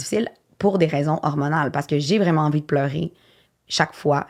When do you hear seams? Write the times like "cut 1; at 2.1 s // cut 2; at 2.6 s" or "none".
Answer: none

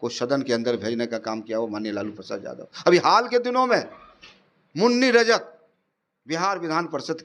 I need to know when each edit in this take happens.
none

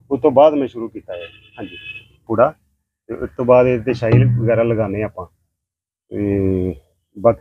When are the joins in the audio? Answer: cut 1; at 2.1 s

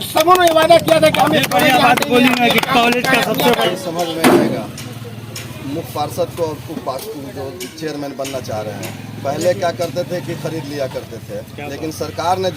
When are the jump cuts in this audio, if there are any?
cut 1; at 3.7 s

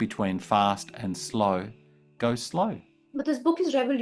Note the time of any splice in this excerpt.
cut 1; at 2.9 s

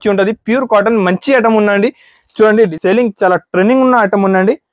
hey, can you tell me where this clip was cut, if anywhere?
cut 1; at 2.7 s

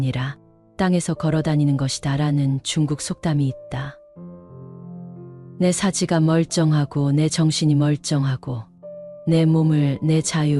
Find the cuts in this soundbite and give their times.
none

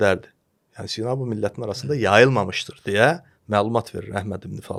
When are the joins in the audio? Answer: none

